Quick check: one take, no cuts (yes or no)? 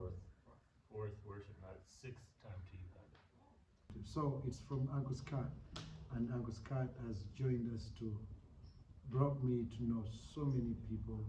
no